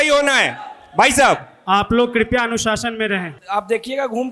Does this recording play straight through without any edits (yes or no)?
no